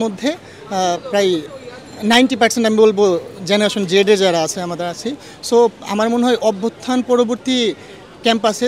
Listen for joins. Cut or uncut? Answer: uncut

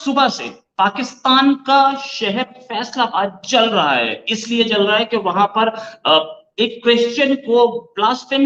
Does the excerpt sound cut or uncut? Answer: uncut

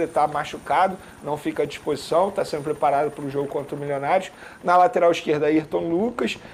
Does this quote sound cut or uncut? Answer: uncut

